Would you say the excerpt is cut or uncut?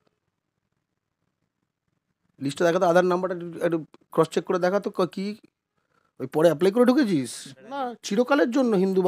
cut